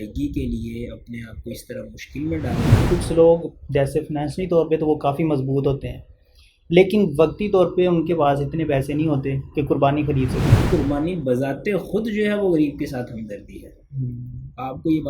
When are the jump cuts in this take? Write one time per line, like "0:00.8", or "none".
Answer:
0:02.8
0:10.6